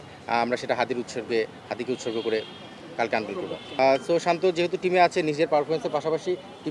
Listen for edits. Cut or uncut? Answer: cut